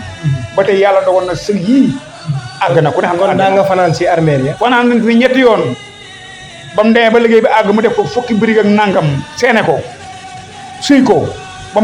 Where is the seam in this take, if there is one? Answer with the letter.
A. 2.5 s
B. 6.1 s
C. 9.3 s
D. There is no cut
D